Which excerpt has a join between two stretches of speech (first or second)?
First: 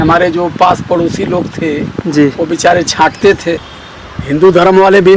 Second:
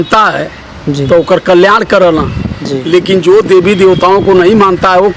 first